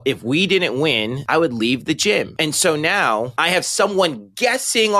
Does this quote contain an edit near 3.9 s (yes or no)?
no